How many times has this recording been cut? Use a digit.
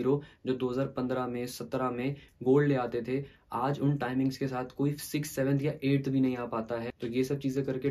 1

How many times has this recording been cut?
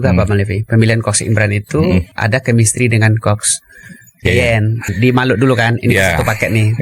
2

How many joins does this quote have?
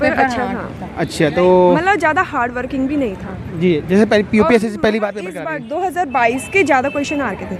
0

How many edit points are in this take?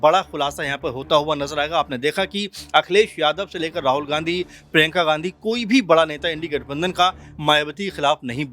0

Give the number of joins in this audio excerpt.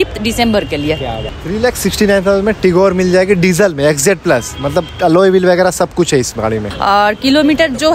2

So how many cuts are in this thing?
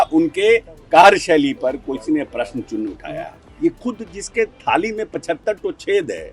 1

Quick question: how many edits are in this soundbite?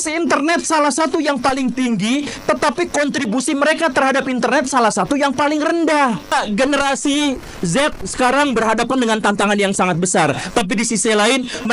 1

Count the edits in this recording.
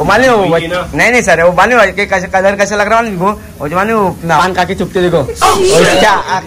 0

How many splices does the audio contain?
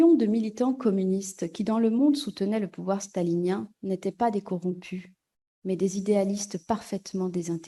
0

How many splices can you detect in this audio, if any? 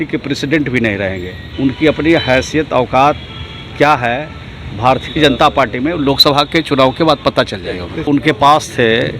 2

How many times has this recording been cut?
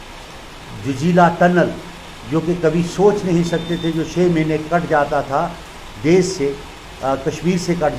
0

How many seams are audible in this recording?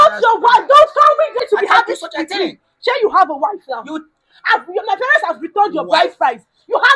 1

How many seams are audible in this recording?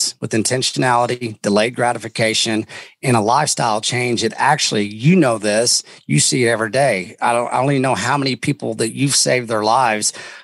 0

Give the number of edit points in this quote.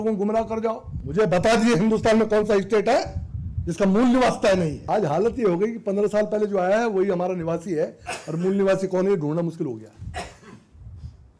2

